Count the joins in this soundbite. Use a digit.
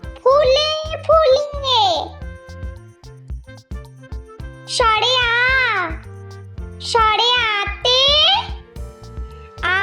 2